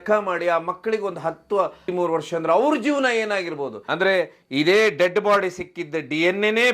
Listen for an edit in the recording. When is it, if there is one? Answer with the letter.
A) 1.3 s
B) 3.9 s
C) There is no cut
B